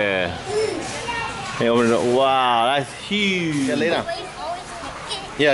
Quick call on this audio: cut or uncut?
cut